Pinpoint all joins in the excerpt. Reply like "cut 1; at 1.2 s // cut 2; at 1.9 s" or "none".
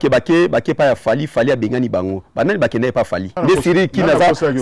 cut 1; at 3.3 s